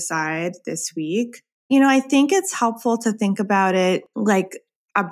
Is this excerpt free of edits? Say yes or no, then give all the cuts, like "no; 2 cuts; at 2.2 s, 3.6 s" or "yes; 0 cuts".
no; 2 cuts; at 1.7 s, 4.1 s